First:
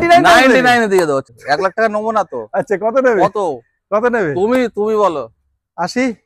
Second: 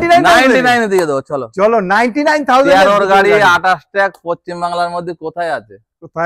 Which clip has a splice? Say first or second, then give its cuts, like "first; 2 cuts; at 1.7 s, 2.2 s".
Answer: first; 1 cut; at 1.3 s